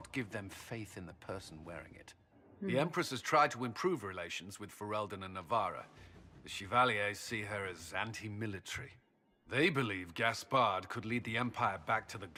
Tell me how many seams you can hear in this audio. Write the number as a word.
zero